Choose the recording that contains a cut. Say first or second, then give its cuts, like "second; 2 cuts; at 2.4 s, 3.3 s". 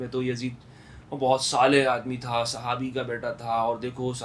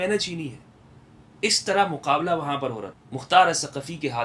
second; 1 cut; at 2.9 s